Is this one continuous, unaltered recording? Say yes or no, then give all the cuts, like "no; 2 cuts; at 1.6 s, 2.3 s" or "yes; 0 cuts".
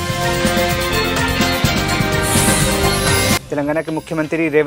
no; 1 cut; at 3.4 s